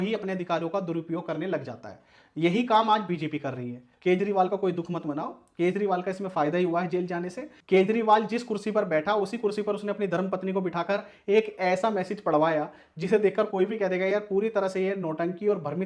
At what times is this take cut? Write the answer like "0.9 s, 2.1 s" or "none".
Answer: 3.9 s, 7.4 s